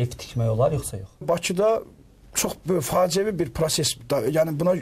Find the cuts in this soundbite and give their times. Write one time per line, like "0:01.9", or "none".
0:01.2